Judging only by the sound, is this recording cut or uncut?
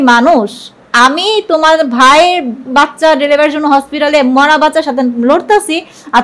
cut